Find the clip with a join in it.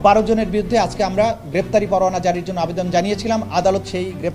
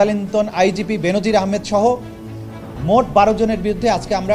second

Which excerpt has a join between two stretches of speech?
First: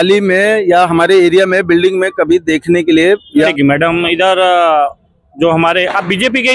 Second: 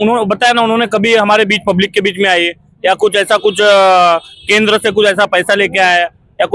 first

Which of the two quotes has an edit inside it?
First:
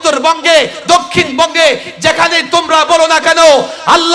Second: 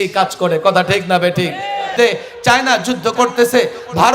second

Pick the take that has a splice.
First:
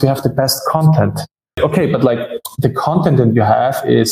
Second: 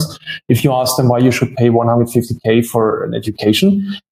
first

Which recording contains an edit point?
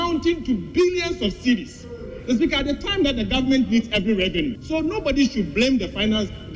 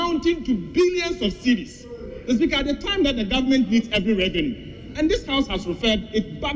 first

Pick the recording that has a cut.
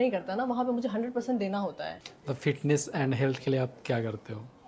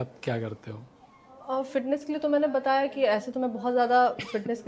first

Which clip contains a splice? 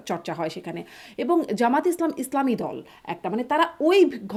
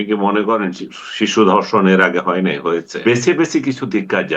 second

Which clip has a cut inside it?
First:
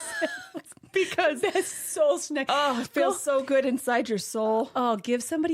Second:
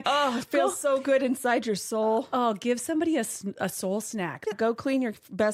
second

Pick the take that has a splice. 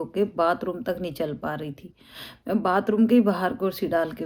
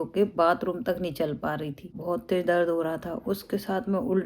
second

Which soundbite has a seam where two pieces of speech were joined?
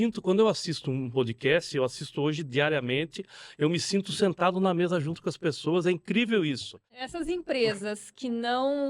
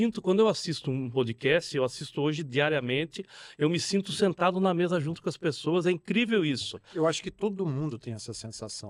first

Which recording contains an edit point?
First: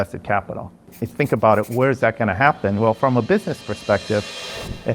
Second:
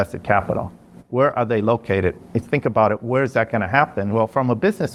first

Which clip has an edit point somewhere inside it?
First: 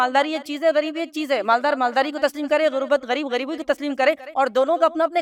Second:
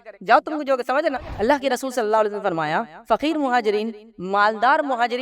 second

